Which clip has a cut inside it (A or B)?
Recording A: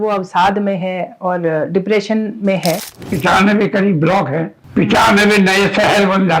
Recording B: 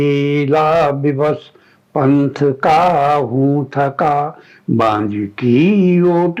A